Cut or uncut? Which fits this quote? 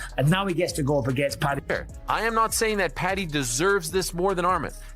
cut